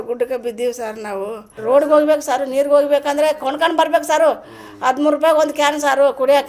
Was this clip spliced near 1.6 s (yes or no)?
yes